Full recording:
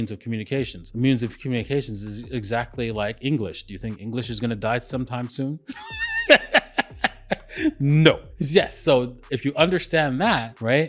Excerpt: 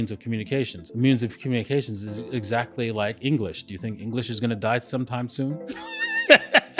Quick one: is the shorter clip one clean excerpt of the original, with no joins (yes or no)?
yes